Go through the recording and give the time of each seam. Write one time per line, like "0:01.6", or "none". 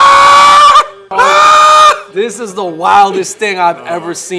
none

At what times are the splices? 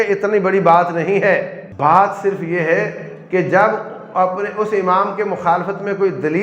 0:01.6

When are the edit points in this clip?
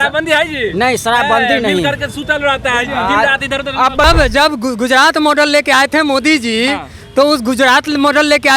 0:04.0

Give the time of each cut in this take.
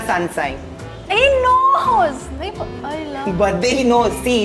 none

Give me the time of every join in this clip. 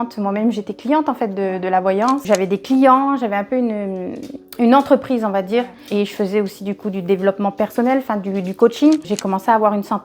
0:02.2
0:05.8
0:09.1

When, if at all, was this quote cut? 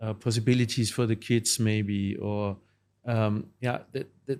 none

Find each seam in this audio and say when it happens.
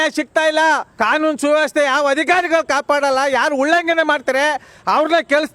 0:00.9

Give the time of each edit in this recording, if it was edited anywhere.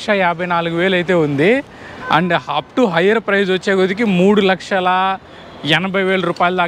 none

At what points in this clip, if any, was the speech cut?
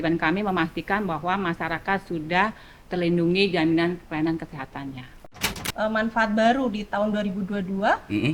0:05.6

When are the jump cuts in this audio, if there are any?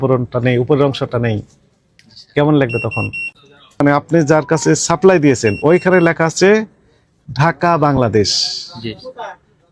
0:03.8

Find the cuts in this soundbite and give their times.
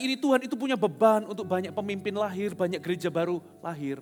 none

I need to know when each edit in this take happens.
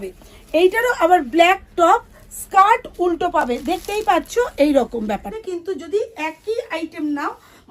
0:05.4

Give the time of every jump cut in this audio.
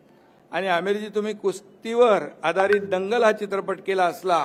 none

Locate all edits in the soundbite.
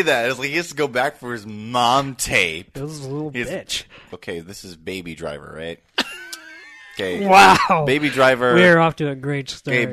0:04.2

